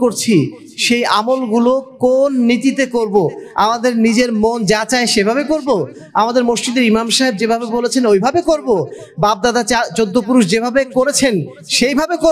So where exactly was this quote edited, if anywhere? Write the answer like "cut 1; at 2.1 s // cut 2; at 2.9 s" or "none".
none